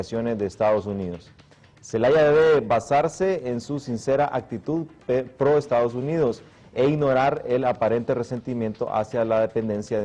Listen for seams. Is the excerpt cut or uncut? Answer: uncut